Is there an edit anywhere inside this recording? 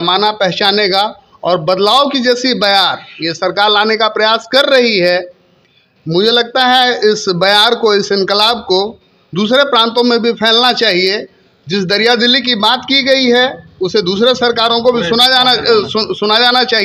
no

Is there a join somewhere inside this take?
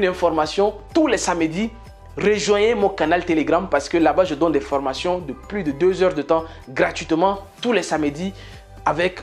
no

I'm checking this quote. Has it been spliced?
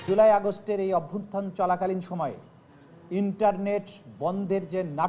no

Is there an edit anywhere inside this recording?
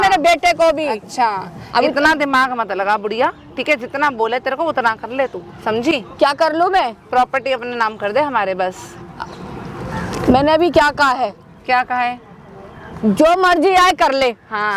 no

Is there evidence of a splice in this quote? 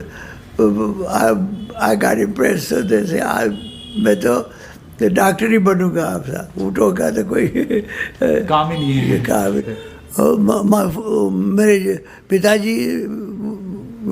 yes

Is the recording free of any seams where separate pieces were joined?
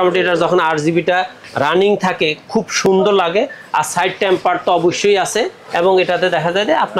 yes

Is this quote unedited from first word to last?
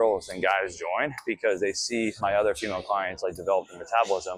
yes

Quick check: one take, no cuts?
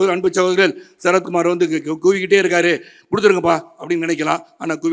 yes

